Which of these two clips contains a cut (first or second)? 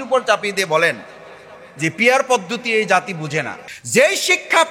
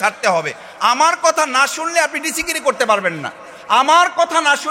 first